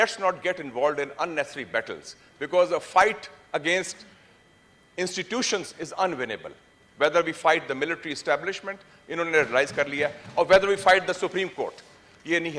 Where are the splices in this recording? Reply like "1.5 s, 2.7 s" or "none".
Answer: none